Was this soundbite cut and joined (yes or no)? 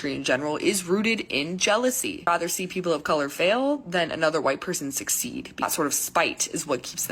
yes